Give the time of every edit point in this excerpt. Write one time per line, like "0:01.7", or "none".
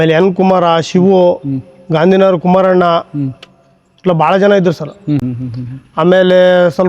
0:05.2